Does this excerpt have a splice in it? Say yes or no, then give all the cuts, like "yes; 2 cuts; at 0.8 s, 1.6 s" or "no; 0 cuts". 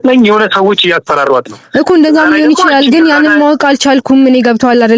no; 0 cuts